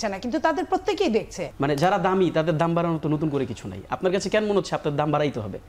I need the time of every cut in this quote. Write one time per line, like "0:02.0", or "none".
0:01.4